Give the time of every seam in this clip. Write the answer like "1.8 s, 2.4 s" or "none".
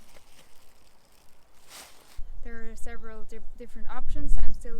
2.1 s